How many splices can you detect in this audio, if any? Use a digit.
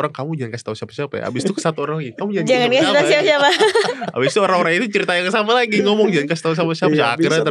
0